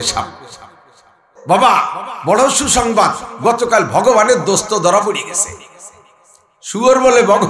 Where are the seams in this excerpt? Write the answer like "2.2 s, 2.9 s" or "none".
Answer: 1.3 s